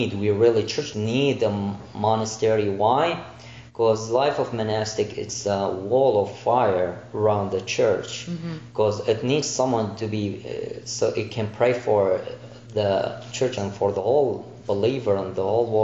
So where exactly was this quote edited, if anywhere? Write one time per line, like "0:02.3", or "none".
0:00.9
0:13.5